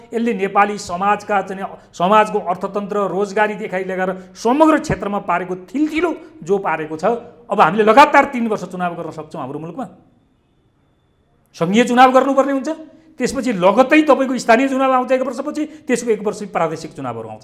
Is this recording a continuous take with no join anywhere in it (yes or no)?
yes